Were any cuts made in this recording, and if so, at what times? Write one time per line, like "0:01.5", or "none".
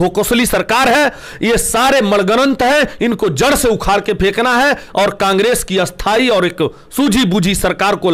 none